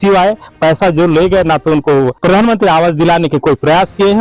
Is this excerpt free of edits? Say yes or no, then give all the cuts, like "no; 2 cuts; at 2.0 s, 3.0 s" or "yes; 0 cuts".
no; 1 cut; at 2.2 s